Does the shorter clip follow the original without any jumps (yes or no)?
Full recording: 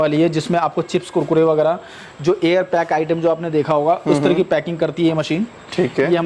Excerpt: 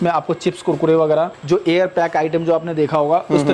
no